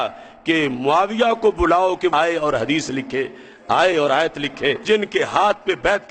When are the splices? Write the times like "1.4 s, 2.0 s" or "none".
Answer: 4.8 s